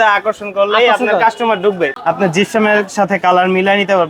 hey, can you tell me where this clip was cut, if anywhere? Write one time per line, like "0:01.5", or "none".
0:01.9